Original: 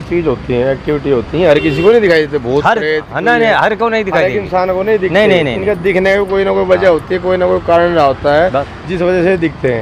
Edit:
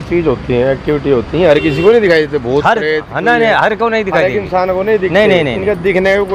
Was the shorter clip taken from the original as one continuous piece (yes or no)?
yes